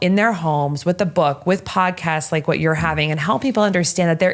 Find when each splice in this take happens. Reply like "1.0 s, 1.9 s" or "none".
none

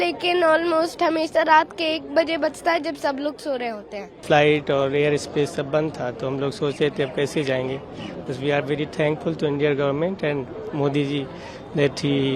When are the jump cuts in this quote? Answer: 4.2 s

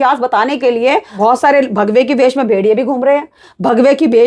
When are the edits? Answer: 1.1 s

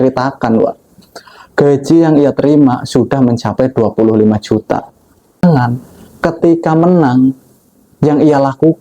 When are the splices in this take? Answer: 5.4 s

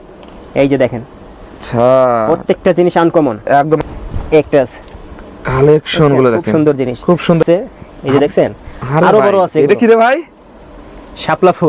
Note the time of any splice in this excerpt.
3.8 s, 7.4 s

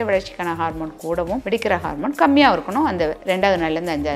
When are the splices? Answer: 1.4 s, 3.2 s

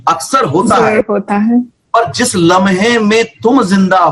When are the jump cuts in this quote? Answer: none

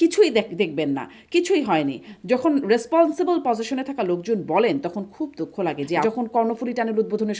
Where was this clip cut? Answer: 6.0 s

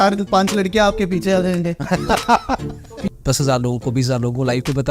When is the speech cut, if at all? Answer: 3.0 s

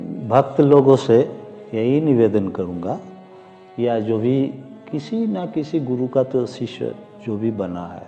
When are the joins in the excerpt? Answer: none

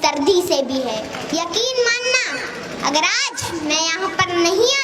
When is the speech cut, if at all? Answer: 1.2 s

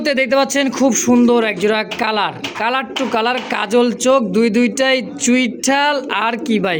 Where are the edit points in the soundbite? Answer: none

